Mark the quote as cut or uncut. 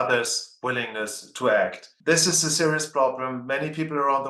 uncut